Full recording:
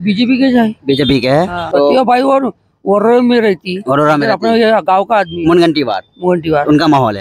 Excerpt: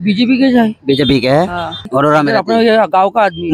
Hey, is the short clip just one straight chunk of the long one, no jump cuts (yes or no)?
no